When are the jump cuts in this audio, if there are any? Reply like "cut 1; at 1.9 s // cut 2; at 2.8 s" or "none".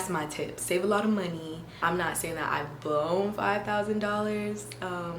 cut 1; at 1.8 s